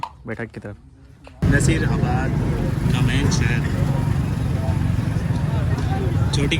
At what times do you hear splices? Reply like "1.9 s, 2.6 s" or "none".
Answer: 1.3 s